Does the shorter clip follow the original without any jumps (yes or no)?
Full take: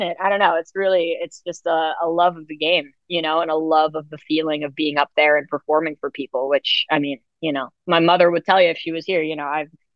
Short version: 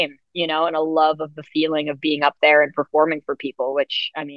yes